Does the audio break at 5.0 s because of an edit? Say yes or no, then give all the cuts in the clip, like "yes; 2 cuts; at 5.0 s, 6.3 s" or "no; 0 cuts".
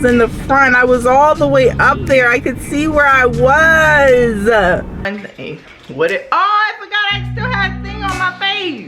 yes; 1 cut; at 5.0 s